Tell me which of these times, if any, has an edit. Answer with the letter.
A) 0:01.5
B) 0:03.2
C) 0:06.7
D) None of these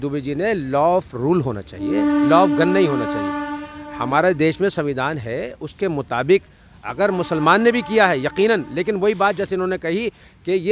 D